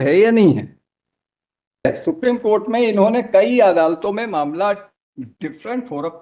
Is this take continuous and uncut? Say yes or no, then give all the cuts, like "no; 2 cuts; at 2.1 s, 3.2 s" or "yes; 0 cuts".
no; 1 cut; at 1.9 s